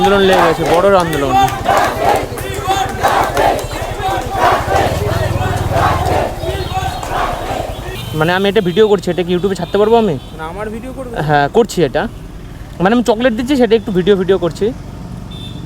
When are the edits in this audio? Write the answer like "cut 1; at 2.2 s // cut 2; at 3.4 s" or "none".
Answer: cut 1; at 7.9 s